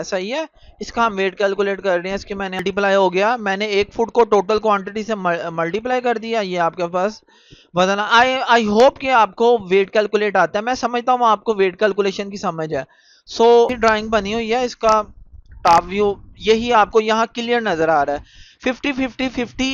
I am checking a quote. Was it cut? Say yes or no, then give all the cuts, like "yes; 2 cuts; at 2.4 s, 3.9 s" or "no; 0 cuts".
yes; 2 cuts; at 2.6 s, 13.8 s